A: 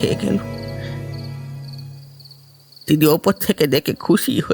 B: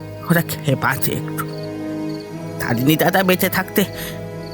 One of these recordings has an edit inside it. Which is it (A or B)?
B